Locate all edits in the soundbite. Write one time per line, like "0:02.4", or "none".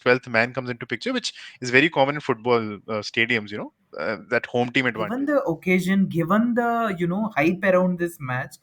0:04.8